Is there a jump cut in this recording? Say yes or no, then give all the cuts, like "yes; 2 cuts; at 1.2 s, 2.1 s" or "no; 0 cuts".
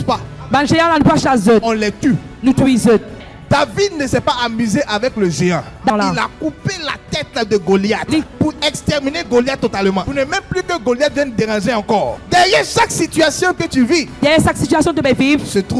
no; 0 cuts